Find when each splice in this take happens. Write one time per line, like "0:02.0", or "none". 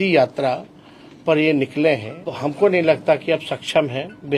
0:02.4

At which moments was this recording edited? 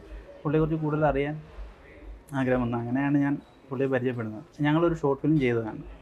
0:04.4

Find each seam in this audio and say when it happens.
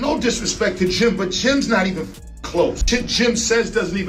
none

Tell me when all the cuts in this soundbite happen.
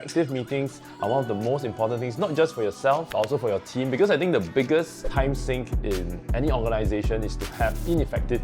0:03.1

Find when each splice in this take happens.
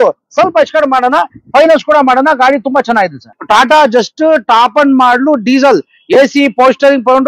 0:03.3

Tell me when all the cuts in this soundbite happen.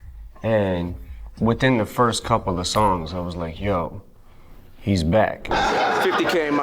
0:05.4

